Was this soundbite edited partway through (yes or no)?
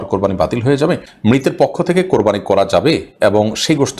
yes